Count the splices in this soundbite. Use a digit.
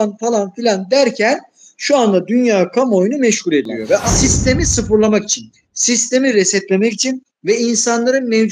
1